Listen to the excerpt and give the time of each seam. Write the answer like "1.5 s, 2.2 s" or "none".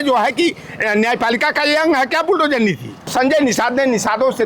3.1 s

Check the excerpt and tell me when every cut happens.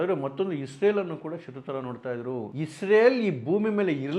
2.5 s

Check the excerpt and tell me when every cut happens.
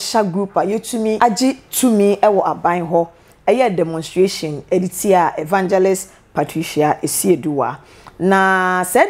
1.2 s

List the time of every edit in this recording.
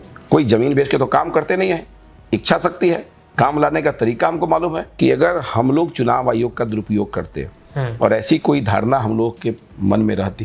4.8 s

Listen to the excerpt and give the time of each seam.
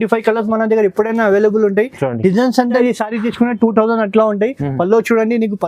2.8 s

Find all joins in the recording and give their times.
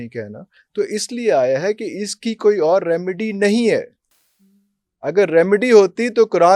none

